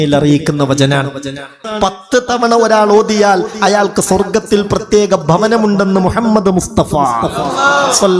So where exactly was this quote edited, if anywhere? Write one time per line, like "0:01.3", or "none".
0:01.7